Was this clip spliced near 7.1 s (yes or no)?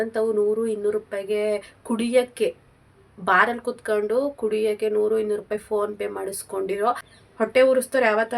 yes